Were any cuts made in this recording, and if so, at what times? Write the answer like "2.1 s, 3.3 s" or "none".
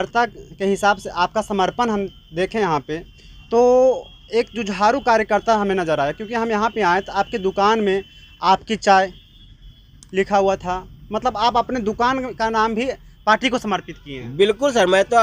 none

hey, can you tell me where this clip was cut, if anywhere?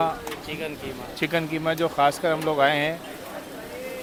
none

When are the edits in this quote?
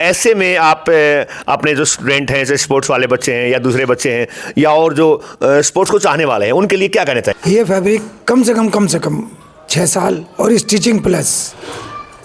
7.4 s

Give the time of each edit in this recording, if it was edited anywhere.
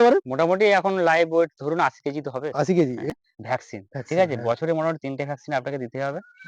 3.1 s

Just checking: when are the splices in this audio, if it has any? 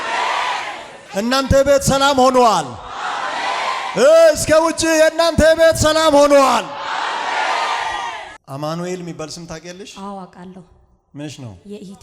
8.4 s

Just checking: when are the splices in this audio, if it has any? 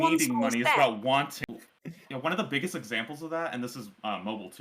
1.4 s

